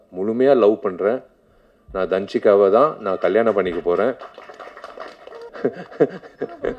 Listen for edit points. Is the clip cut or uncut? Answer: cut